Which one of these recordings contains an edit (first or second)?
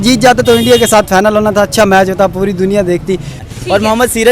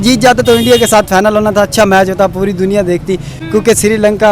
first